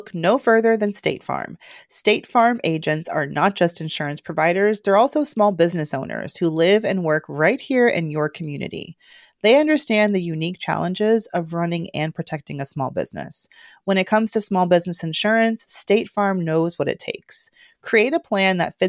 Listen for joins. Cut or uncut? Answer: uncut